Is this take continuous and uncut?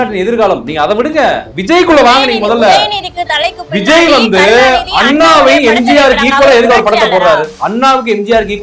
yes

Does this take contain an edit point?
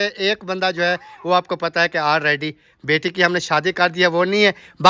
no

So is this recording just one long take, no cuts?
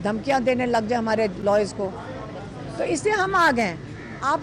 yes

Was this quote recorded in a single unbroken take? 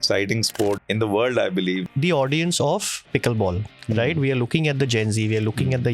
no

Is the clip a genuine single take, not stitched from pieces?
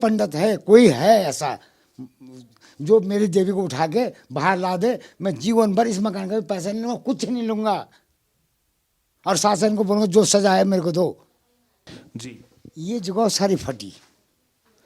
no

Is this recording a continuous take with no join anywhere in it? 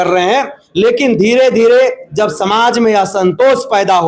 yes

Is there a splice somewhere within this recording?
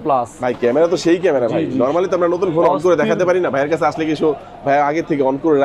no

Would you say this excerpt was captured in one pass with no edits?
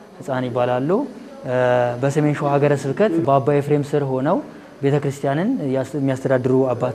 yes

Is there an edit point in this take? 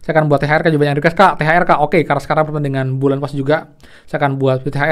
no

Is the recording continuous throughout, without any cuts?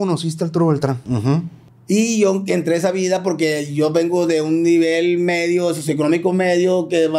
no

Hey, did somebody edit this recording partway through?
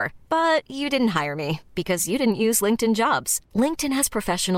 no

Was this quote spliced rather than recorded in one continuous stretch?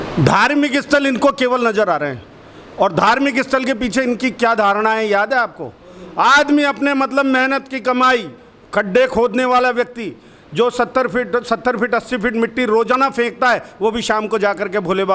no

